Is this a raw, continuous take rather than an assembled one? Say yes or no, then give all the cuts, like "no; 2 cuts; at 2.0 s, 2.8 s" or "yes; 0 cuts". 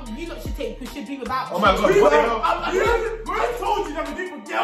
yes; 0 cuts